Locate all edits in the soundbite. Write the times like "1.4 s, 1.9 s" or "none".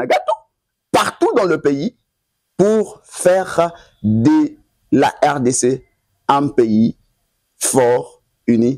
none